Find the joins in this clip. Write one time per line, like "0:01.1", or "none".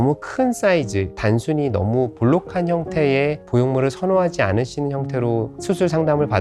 none